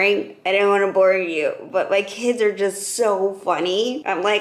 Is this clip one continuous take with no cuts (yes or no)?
yes